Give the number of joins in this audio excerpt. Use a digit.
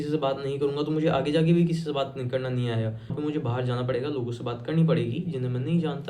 1